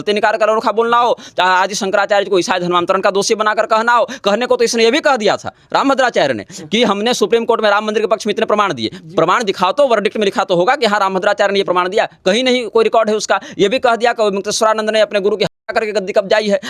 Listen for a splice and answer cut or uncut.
uncut